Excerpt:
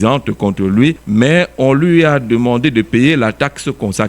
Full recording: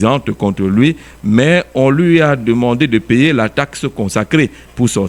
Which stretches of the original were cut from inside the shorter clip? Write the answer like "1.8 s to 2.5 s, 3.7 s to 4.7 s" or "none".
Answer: 1.0 s to 1.2 s